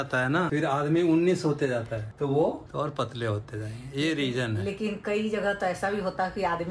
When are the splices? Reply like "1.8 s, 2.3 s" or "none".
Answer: 2.1 s, 2.7 s